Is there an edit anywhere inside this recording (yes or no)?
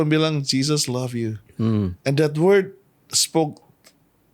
no